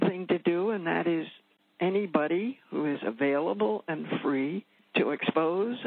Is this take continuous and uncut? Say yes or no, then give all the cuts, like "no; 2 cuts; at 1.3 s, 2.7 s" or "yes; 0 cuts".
no; 1 cut; at 4.7 s